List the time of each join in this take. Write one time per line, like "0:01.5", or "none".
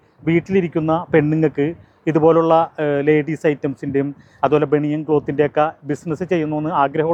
none

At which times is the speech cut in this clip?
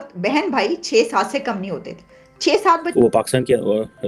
0:02.9

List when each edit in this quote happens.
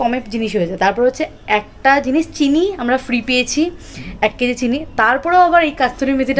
none

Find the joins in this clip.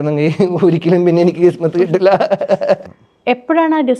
0:02.8

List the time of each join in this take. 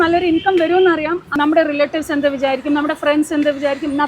0:01.3

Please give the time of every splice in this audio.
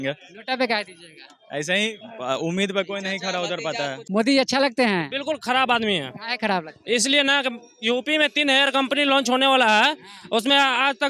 0:04.0

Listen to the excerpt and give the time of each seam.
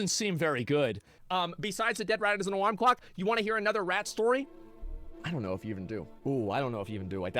0:01.2

